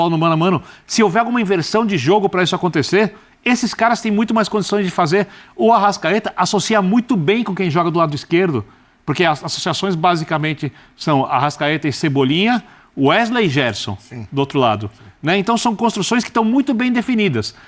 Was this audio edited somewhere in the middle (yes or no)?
no